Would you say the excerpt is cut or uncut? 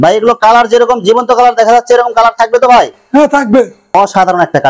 cut